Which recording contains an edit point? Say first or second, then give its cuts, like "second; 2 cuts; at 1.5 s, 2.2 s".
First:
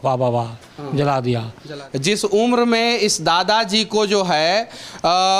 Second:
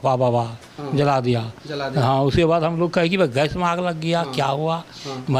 first; 1 cut; at 1.8 s